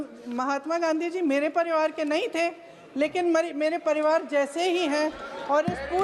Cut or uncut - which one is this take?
uncut